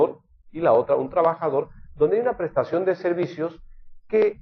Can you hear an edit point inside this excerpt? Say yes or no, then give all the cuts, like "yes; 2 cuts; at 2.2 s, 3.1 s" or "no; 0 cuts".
no; 0 cuts